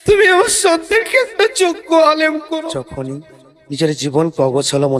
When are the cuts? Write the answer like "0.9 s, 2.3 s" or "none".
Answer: 2.6 s

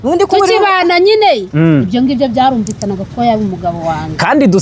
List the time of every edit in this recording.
none

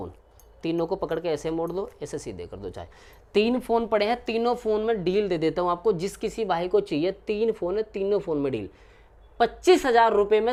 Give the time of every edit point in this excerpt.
none

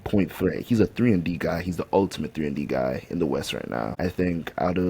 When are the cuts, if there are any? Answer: 3.9 s

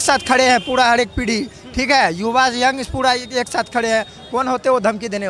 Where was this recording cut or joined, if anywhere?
none

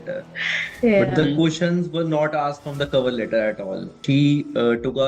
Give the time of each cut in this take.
4.0 s

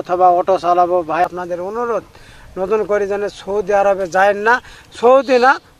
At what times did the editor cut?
1.2 s

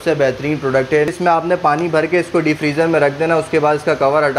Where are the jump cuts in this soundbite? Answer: 1.1 s

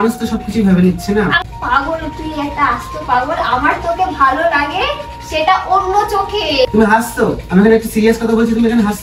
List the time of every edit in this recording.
1.4 s, 6.7 s

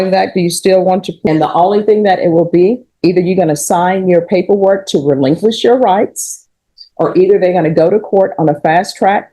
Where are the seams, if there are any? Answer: 1.1 s

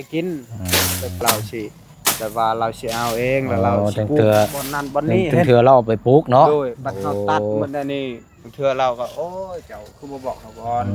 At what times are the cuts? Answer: 1.2 s

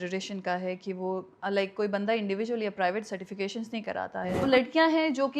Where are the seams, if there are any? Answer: 4.4 s

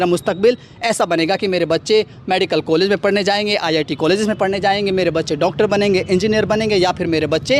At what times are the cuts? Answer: none

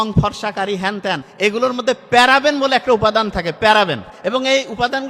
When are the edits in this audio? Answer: 1.3 s, 4.1 s

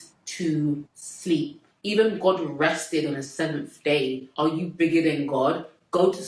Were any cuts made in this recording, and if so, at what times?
none

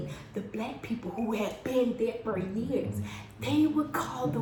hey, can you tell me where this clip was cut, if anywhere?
none

